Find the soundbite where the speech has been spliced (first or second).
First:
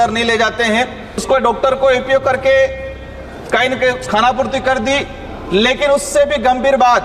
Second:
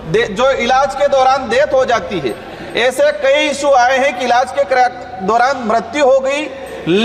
first